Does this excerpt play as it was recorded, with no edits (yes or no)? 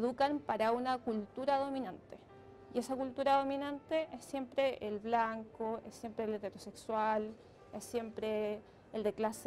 yes